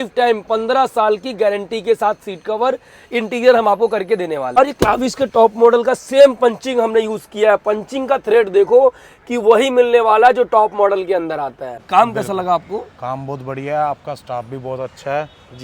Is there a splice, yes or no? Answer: yes